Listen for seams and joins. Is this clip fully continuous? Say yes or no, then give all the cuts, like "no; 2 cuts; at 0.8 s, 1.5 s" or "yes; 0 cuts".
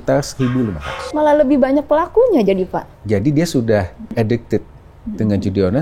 no; 3 cuts; at 1.0 s, 2.9 s, 4.1 s